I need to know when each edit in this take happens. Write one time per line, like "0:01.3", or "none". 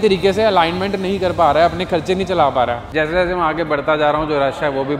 0:02.8